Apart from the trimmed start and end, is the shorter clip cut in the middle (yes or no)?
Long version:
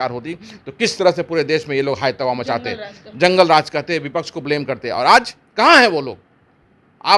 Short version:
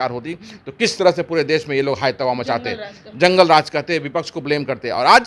no